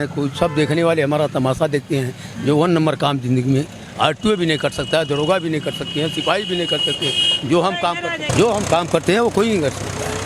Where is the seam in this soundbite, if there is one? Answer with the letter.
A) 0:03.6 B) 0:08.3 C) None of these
B